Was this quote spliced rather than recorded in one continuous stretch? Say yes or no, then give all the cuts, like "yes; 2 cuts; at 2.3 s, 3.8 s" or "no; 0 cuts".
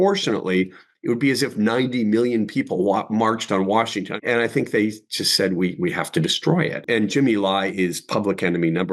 yes; 2 cuts; at 4.2 s, 6.8 s